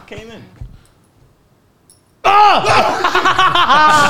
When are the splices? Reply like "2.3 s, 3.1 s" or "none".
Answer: none